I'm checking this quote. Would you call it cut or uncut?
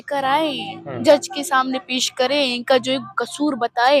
uncut